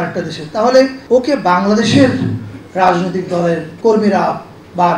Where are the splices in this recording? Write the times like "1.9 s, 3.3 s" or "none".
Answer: 1.0 s, 3.7 s